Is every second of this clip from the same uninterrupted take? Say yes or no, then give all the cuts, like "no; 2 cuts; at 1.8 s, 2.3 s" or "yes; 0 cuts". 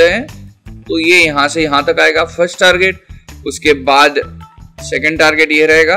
yes; 0 cuts